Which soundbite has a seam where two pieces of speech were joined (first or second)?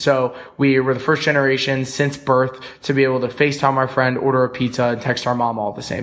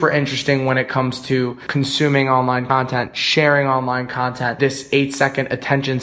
second